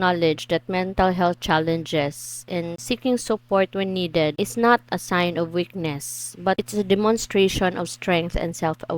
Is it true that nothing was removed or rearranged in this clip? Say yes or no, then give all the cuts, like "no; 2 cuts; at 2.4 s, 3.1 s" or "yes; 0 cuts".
no; 3 cuts; at 2.8 s, 4.3 s, 6.6 s